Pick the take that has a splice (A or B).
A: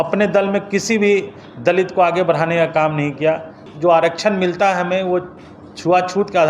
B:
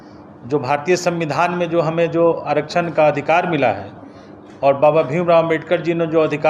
A